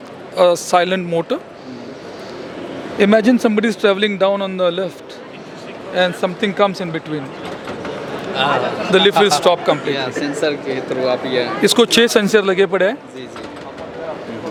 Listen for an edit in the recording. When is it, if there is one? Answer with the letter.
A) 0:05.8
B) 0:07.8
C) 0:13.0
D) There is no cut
D